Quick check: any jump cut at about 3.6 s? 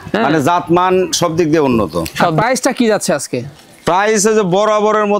no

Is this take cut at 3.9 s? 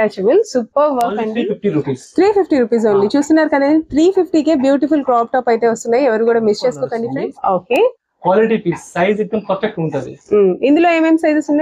no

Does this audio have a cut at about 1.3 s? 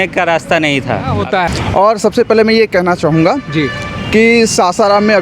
yes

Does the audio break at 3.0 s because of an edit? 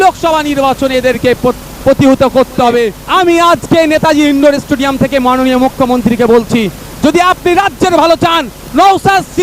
yes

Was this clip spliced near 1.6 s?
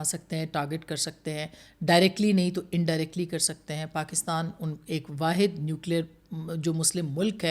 no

